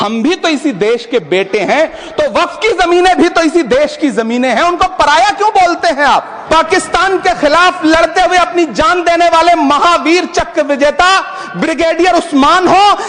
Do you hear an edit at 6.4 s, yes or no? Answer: yes